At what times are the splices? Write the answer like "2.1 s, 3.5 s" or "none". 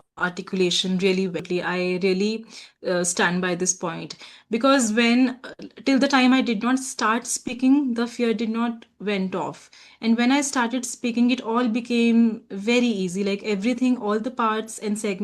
1.4 s

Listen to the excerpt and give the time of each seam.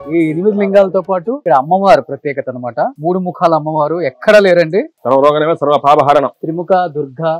1.4 s, 3.0 s, 4.9 s, 6.4 s

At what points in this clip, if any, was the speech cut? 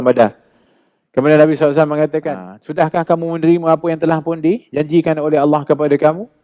2.2 s

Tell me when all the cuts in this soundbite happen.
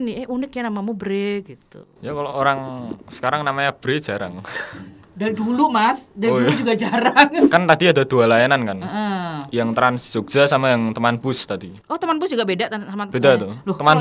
7.4 s

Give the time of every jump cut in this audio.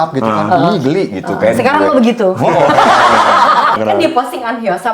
3.8 s

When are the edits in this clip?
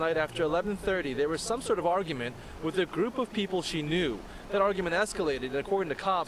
1.4 s, 4.8 s

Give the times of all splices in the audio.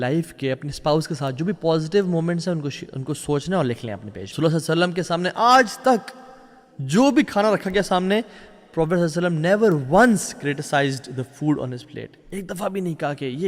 4.3 s

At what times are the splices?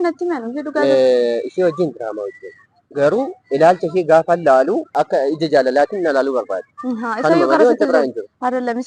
4.9 s

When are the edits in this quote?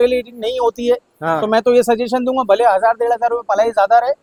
none

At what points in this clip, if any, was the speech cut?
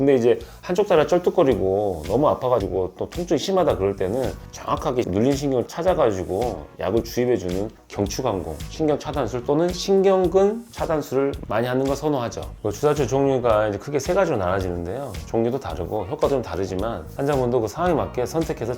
17.2 s

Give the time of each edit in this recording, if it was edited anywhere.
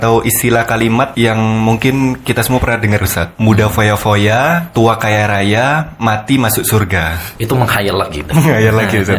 1.1 s, 3.2 s, 4.7 s, 7.3 s

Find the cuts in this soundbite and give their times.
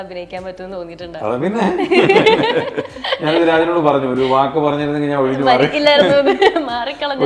none

